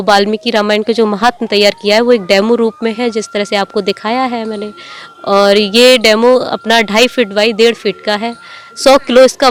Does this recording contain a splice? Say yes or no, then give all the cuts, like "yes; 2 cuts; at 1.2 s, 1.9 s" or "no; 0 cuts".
no; 0 cuts